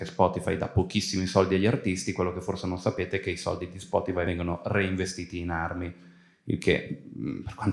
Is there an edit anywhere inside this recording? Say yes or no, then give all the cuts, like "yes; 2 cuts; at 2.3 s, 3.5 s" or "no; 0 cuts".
yes; 1 cut; at 4.3 s